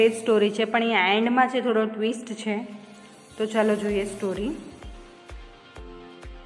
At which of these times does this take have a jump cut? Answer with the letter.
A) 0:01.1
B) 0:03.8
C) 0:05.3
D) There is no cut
C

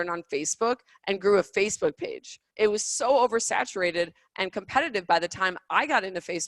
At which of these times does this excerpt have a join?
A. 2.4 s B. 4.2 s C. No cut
A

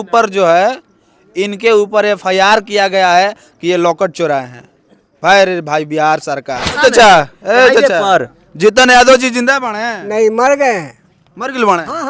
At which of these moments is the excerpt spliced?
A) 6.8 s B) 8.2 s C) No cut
A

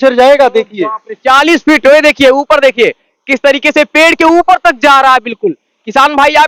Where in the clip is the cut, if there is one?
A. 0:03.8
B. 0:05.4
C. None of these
C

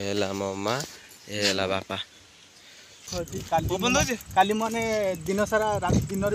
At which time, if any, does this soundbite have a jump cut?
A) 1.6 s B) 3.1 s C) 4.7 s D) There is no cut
B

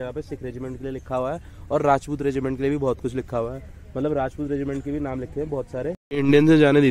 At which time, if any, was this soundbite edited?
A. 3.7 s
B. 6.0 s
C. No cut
B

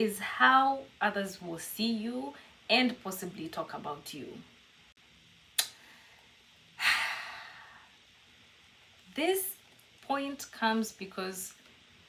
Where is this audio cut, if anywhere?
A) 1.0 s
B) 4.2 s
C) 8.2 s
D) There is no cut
D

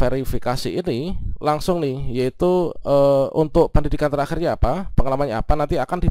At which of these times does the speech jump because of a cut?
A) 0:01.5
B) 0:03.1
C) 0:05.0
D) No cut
D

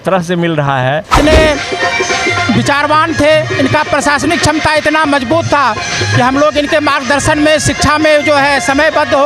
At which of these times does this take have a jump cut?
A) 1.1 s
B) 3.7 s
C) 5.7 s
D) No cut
A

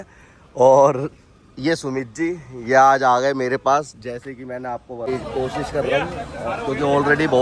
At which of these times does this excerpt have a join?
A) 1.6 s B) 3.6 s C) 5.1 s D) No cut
C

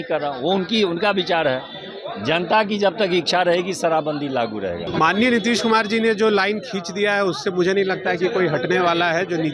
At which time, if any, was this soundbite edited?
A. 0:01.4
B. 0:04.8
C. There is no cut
B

